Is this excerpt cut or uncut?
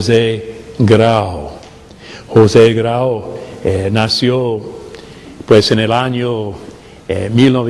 cut